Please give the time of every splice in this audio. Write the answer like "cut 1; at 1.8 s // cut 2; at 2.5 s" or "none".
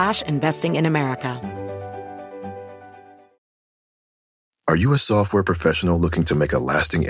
cut 1; at 1.4 s